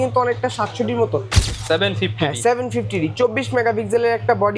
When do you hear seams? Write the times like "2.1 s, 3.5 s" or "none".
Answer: 1.4 s